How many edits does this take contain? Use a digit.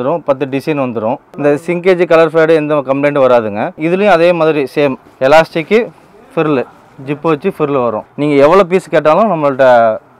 3